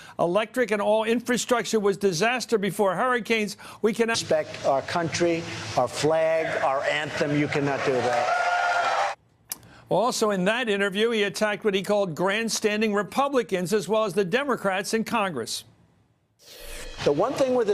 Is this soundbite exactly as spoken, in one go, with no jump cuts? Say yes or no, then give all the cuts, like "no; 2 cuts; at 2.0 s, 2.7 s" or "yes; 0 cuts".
yes; 0 cuts